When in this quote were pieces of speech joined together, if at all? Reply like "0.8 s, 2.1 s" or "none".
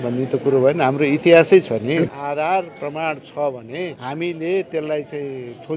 2.1 s, 4.0 s